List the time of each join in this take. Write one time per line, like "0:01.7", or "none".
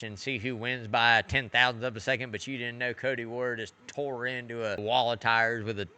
0:04.8